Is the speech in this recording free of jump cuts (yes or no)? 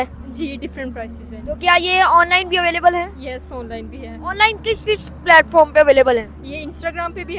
yes